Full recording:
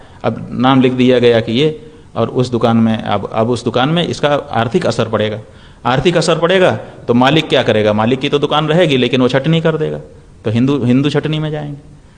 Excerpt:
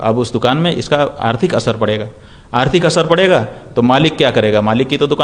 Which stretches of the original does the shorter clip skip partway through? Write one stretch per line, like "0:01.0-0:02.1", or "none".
none